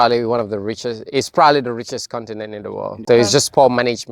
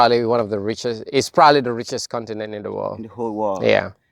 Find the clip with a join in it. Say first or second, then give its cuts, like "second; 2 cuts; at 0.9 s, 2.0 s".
first; 1 cut; at 3.0 s